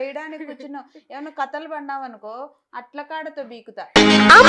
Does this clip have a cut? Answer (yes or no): no